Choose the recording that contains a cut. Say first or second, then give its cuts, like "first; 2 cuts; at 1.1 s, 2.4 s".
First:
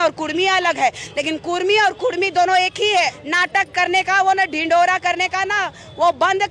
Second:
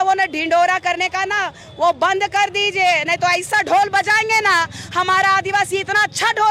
first; 1 cut; at 3.2 s